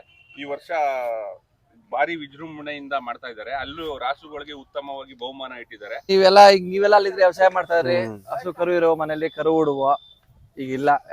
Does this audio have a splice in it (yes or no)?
yes